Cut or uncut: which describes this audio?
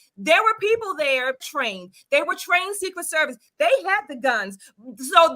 cut